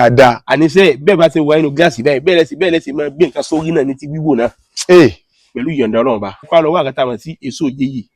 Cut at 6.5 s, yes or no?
yes